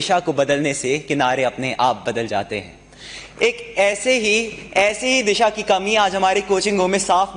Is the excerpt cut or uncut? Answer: uncut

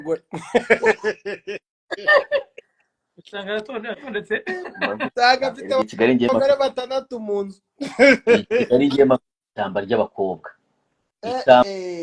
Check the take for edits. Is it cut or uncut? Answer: uncut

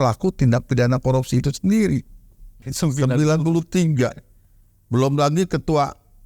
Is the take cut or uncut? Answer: cut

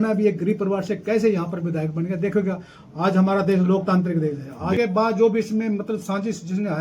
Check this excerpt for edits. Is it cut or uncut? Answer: cut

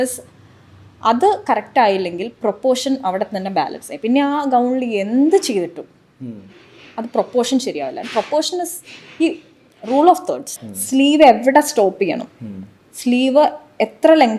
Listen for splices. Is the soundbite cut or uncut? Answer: uncut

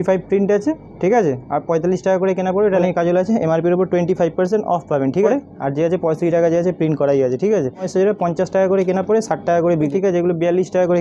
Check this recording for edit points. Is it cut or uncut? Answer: cut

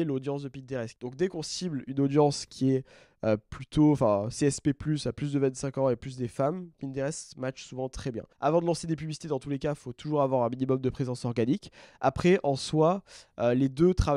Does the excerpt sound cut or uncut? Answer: cut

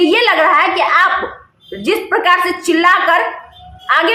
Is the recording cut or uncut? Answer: uncut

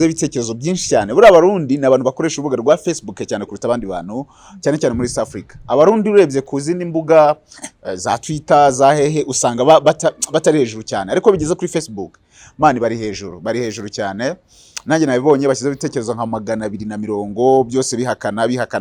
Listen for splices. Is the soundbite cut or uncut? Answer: uncut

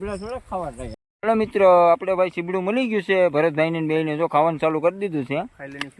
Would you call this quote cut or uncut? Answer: cut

